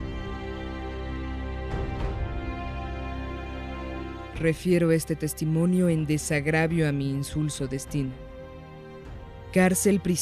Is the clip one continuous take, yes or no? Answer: no